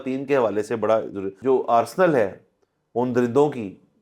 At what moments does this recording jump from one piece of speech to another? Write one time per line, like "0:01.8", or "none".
0:01.3